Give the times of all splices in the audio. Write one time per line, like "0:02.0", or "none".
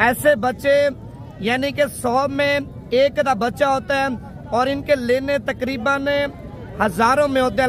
none